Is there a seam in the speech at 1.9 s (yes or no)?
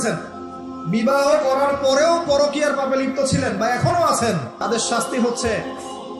no